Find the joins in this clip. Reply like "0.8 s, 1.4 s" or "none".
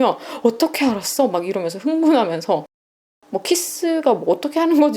3.1 s